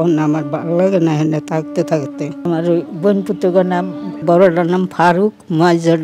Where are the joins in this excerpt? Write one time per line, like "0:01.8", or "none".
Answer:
0:02.4